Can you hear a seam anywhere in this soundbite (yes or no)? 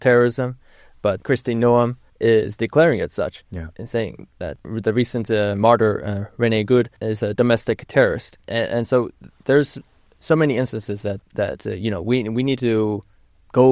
yes